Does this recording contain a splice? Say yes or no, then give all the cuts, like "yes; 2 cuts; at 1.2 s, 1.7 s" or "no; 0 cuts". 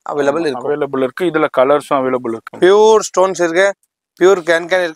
yes; 1 cut; at 2.4 s